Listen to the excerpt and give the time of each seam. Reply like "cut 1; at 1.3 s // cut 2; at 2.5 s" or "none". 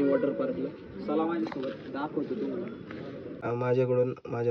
cut 1; at 3.4 s

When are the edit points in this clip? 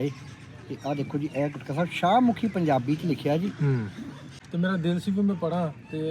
cut 1; at 4.3 s

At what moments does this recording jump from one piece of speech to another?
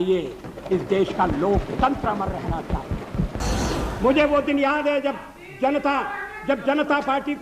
cut 1; at 3.4 s

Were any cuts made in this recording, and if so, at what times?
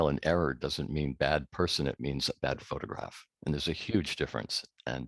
none

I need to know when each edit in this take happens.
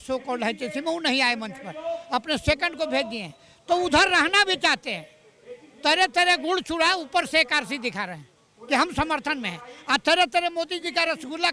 none

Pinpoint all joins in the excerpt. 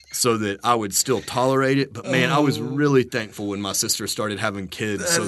none

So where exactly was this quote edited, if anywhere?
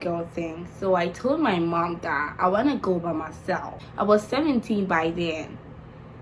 cut 1; at 3.8 s

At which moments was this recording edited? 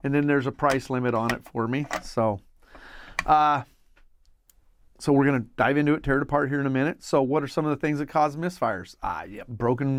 none

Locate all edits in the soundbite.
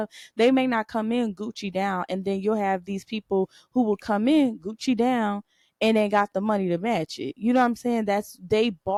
none

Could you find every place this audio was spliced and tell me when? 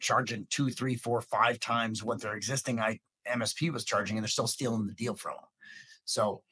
none

